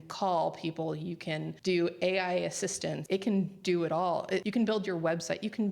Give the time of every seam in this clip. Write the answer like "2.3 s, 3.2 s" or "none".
1.5 s, 3.0 s, 4.5 s